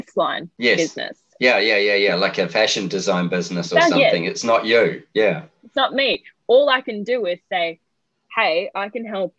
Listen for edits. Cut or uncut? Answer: uncut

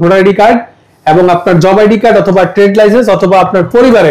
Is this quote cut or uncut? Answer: uncut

